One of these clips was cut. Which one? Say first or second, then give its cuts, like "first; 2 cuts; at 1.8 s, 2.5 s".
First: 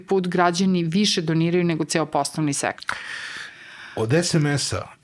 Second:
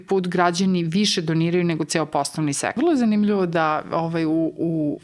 second; 1 cut; at 2.8 s